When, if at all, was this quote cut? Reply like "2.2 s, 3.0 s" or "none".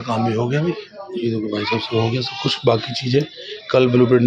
none

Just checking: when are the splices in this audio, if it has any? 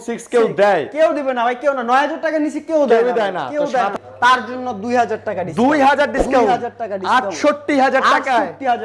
3.9 s

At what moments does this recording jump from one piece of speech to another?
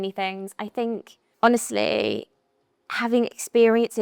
1.2 s

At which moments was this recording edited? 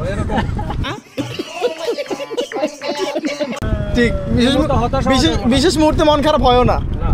3.6 s

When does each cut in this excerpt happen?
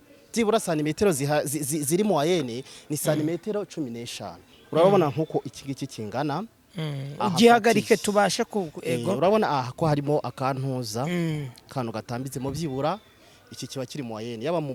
none

